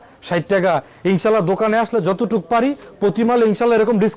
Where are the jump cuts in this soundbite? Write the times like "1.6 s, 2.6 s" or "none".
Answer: none